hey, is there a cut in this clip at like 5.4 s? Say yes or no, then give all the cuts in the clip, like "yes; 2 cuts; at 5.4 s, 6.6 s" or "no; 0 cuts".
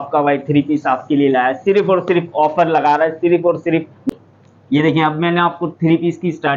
no; 1 cut; at 3.9 s